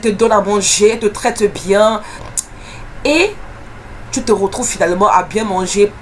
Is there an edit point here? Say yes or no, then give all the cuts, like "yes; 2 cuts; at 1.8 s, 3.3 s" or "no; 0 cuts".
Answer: yes; 1 cut; at 2.1 s